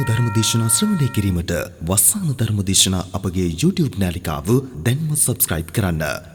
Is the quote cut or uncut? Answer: uncut